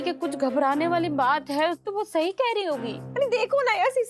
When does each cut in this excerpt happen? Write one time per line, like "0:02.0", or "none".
0:01.8
0:03.0